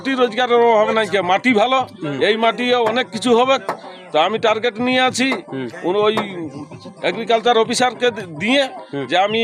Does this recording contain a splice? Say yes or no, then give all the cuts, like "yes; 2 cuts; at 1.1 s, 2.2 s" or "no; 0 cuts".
no; 0 cuts